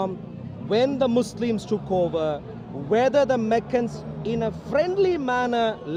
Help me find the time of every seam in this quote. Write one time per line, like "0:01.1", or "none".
none